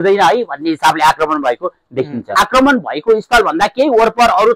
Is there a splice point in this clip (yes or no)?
yes